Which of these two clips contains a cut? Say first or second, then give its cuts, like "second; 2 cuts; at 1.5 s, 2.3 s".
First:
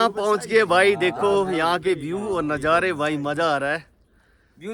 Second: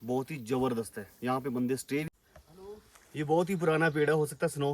second; 1 cut; at 2.1 s